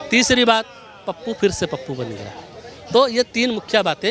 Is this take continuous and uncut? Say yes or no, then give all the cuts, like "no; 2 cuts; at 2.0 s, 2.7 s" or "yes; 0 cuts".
yes; 0 cuts